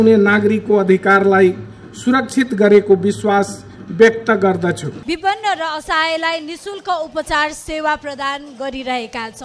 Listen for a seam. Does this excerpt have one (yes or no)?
yes